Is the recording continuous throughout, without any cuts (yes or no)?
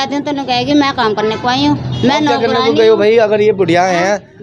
yes